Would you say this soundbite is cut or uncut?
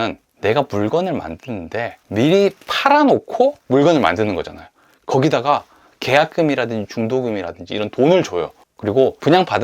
cut